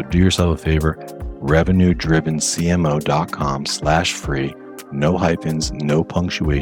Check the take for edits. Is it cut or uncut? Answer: uncut